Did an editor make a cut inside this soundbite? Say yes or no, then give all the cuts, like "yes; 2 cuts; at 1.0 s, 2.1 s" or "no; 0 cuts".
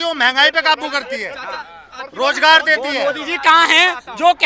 no; 0 cuts